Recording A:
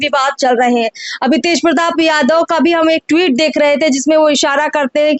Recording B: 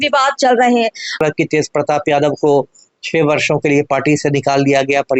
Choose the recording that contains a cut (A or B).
B